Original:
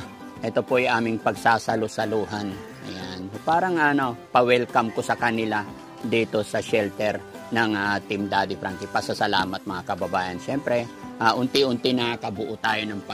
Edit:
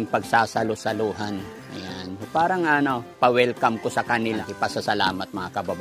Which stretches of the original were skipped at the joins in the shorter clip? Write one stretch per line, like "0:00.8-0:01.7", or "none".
0:05.6-0:08.8